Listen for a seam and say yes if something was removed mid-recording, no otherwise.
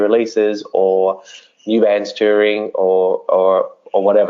no